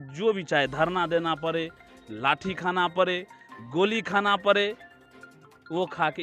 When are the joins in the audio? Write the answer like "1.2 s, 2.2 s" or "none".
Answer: none